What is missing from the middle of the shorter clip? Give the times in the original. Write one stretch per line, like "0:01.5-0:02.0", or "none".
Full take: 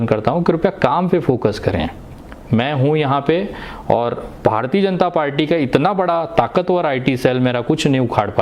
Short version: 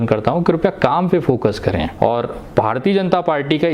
0:01.9-0:03.8